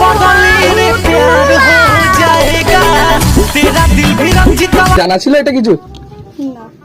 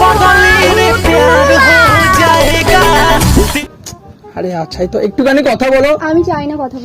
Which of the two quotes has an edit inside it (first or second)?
second